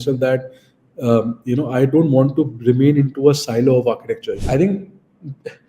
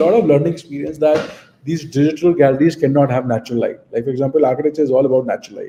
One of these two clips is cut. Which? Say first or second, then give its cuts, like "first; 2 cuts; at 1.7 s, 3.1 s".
first; 1 cut; at 4.4 s